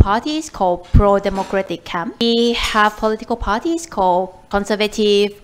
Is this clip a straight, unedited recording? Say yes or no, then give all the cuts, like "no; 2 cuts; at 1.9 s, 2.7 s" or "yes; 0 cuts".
no; 2 cuts; at 2.2 s, 4.4 s